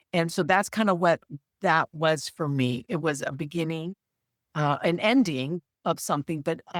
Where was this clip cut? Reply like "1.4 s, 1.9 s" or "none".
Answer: none